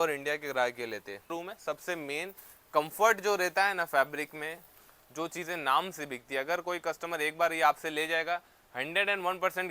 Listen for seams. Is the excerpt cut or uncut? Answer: cut